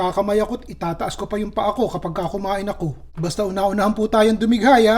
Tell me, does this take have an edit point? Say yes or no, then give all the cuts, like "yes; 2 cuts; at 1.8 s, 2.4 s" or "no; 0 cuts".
yes; 1 cut; at 3.0 s